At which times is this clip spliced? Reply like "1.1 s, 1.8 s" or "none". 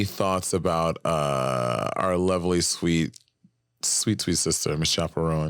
none